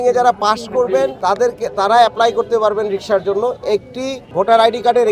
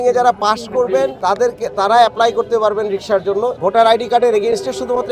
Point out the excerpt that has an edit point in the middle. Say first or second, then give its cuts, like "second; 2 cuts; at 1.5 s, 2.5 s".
second; 1 cut; at 3.6 s